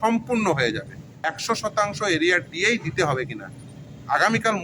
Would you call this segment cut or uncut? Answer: cut